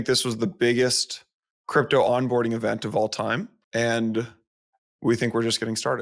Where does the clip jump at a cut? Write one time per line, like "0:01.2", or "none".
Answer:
0:03.6